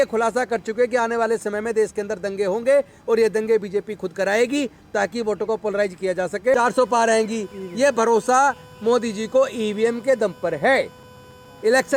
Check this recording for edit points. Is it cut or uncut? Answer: cut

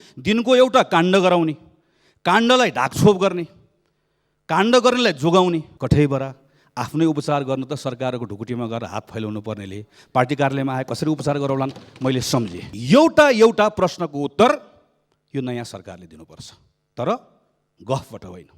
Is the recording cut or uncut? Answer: cut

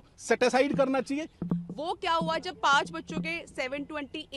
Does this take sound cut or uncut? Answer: cut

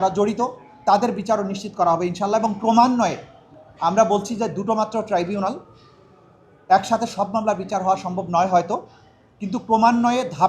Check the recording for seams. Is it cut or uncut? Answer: uncut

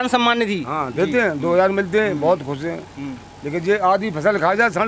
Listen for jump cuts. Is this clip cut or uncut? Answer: uncut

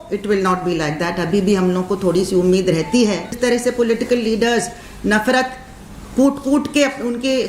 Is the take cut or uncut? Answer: cut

